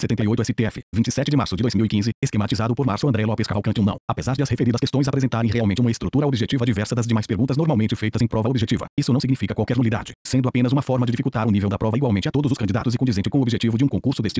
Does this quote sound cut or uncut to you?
cut